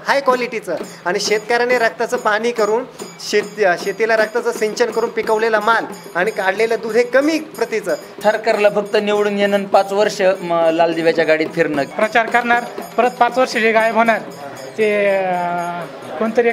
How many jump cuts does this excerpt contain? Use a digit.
2